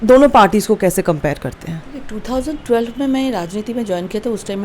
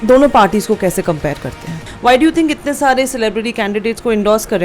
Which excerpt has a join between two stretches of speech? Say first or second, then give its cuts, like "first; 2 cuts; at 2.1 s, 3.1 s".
second; 1 cut; at 1.9 s